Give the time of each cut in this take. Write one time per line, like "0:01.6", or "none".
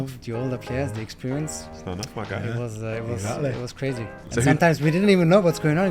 0:01.7